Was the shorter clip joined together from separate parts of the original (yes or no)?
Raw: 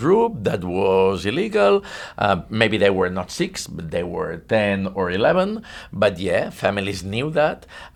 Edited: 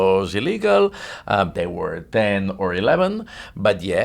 yes